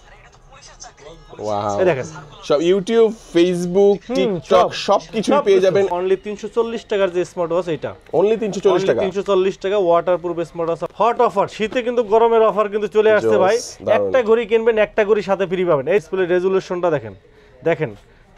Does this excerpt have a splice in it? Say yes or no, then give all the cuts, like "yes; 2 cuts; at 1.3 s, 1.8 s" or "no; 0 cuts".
yes; 3 cuts; at 5.9 s, 10.8 s, 16.0 s